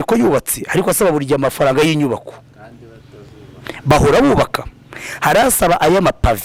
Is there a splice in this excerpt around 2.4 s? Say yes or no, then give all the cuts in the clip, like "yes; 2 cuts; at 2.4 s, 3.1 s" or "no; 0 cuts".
no; 0 cuts